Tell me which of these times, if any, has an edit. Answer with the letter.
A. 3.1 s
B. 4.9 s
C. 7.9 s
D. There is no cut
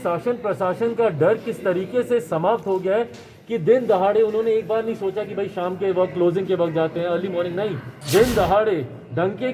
C